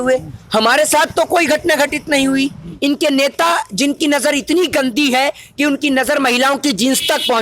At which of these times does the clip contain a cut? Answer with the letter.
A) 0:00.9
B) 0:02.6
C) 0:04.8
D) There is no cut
B